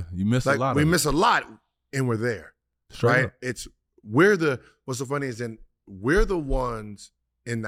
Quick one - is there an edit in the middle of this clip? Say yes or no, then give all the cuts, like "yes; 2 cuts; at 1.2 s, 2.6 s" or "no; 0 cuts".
no; 0 cuts